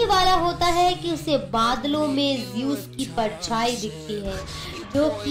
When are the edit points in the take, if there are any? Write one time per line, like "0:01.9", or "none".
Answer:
none